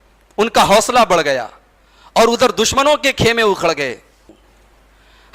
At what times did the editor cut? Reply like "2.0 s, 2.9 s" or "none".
4.2 s